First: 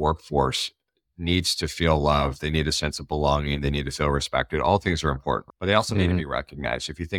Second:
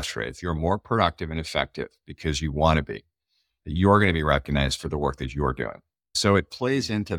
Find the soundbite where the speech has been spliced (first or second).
second